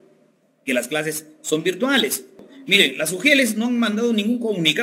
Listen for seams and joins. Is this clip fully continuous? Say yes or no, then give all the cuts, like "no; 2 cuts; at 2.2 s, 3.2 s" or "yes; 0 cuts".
no; 1 cut; at 2.5 s